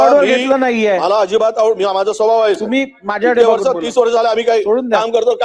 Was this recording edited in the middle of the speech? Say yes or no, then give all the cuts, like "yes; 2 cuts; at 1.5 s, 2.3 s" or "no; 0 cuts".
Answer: no; 0 cuts